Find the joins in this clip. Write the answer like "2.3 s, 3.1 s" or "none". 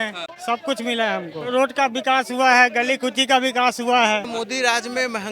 1.5 s, 4.3 s